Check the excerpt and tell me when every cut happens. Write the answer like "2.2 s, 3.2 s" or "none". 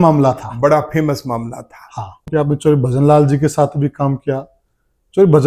2.2 s